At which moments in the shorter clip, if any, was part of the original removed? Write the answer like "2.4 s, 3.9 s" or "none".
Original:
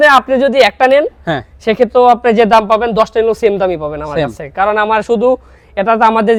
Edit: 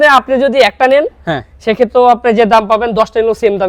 none